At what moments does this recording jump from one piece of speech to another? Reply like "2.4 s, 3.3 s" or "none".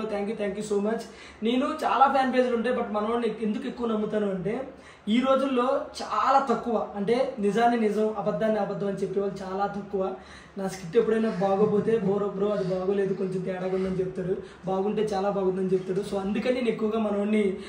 none

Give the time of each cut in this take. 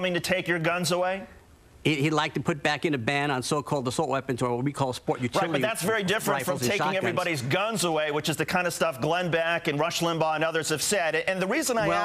1.4 s

